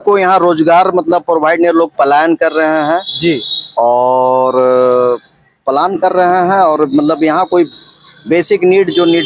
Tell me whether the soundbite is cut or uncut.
uncut